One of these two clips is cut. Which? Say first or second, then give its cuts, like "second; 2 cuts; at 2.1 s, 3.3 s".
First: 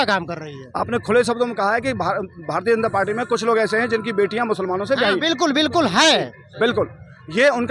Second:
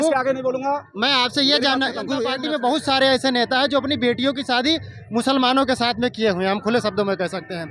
second; 1 cut; at 2.3 s